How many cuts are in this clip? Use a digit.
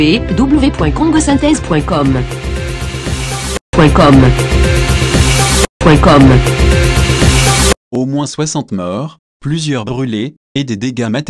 1